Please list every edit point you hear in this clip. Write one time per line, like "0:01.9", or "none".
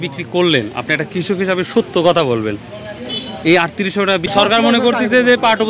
0:04.3

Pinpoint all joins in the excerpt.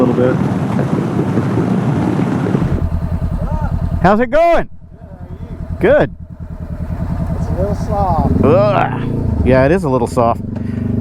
0:02.7

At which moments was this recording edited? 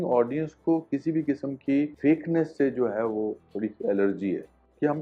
none

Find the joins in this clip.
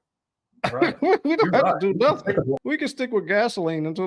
0:02.6

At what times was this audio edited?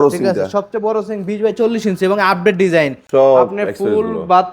0:03.0

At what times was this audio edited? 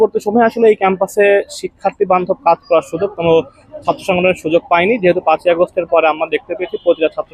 none

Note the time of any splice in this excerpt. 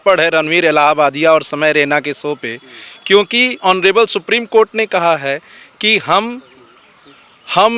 none

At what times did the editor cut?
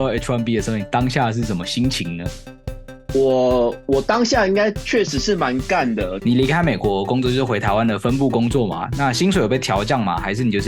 0:06.2

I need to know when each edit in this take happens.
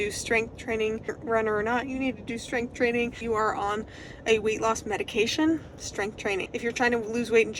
0:01.2
0:03.2
0:06.5

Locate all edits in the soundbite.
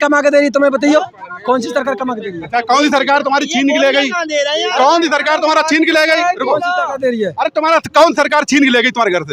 none

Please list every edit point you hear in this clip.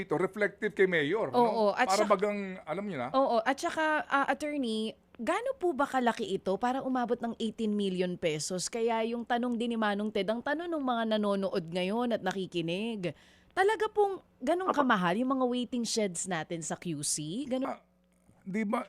0:17.6

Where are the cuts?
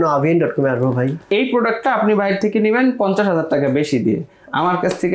0:01.3

